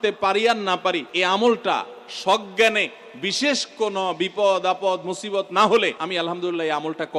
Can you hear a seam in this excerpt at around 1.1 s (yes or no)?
yes